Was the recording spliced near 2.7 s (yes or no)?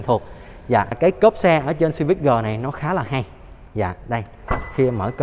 no